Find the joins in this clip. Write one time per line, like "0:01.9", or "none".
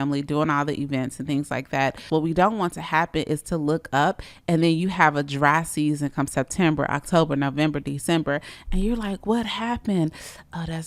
0:02.1